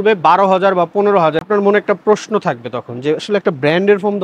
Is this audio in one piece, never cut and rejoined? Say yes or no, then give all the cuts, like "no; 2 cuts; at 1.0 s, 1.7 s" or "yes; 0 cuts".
no; 1 cut; at 1.4 s